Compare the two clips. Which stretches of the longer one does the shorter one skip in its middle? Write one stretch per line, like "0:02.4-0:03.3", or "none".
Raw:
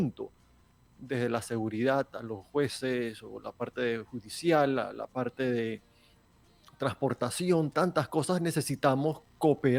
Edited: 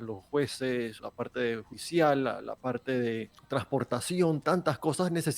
0:03.7-0:04.0
0:05.9-0:06.6